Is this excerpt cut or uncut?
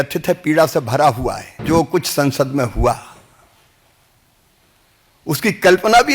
cut